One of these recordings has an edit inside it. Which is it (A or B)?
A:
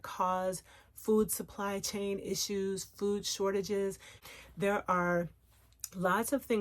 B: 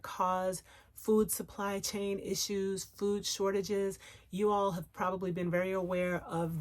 A